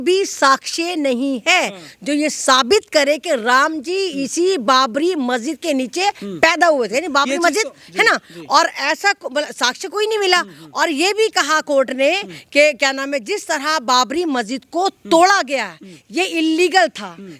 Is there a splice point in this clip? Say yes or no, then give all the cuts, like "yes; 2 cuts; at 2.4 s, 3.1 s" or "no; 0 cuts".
no; 0 cuts